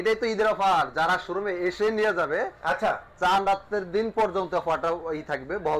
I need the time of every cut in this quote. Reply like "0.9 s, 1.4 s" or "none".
none